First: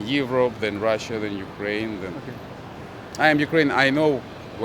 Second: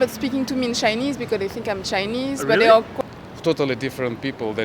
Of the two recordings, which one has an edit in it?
second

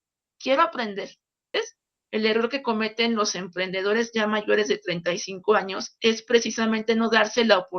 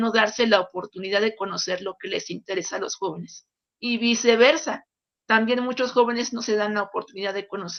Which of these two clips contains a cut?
first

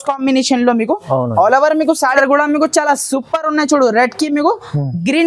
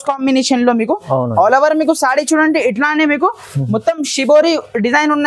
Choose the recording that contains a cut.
first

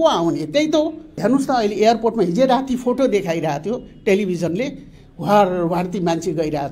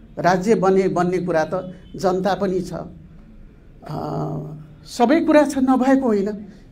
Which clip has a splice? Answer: first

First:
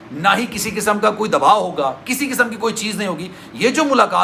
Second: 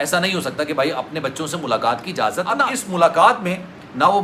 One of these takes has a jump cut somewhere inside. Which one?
second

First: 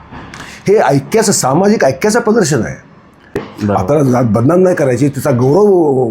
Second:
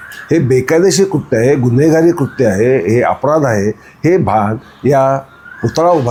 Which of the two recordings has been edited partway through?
first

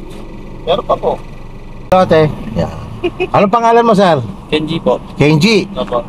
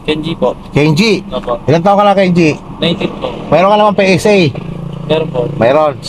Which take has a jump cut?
first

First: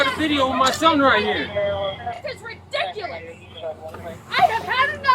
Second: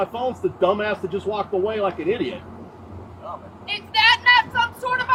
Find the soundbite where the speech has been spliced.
first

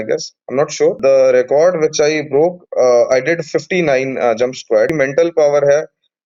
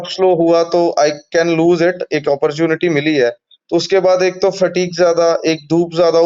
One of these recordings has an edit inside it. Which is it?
first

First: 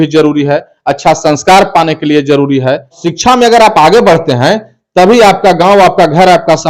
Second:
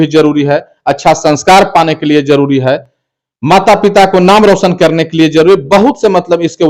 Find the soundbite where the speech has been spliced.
first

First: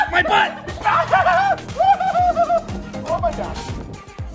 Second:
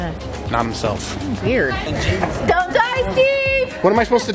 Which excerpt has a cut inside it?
second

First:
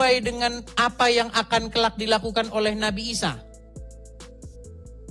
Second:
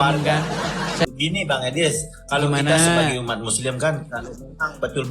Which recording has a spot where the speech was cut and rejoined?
second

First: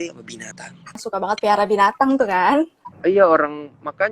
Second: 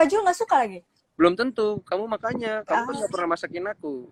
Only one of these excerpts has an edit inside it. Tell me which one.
first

